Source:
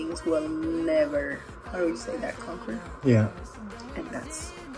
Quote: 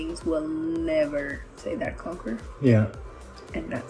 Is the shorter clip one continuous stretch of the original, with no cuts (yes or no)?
no